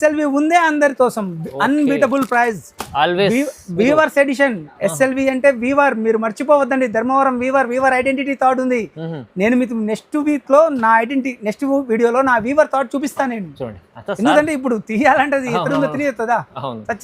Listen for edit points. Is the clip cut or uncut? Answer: uncut